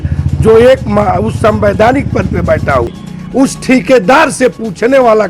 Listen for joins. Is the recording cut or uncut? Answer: cut